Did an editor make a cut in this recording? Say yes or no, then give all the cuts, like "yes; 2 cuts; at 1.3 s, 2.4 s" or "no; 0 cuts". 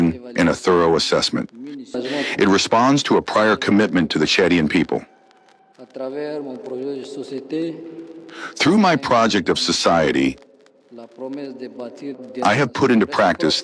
yes; 1 cut; at 2.0 s